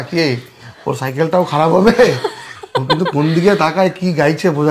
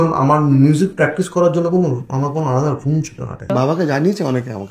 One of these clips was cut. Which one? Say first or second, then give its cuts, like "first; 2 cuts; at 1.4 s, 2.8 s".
second; 1 cut; at 3.5 s